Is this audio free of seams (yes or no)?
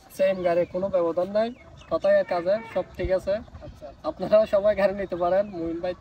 yes